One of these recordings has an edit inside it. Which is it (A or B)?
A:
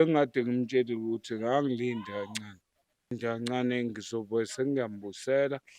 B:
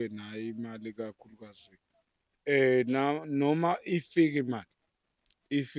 A